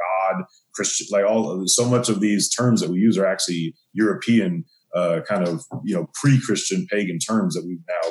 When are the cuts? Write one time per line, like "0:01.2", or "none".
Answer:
none